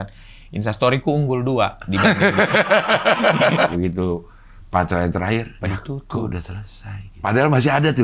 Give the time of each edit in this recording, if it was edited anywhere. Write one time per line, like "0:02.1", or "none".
0:03.7
0:05.5
0:07.3